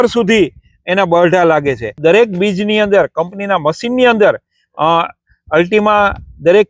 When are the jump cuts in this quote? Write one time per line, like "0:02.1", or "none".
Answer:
0:02.0